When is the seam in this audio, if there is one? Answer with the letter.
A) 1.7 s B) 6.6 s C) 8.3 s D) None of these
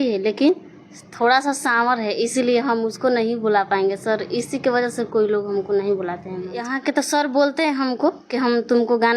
B